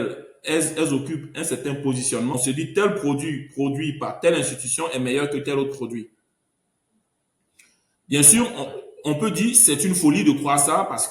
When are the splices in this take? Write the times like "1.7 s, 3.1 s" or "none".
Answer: 2.3 s